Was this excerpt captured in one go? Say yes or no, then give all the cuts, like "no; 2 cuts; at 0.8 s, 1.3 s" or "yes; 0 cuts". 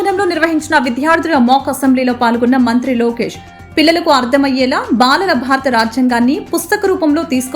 yes; 0 cuts